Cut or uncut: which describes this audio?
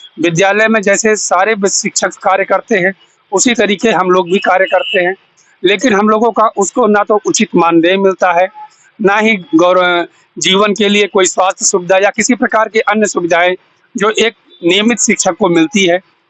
uncut